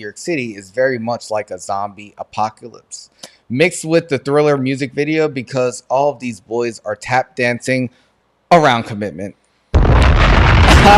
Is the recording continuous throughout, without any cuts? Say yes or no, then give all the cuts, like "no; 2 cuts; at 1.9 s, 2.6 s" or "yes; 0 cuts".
yes; 0 cuts